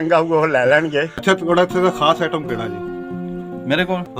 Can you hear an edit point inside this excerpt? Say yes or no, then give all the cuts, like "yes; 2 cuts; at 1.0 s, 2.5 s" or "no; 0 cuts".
yes; 1 cut; at 1.1 s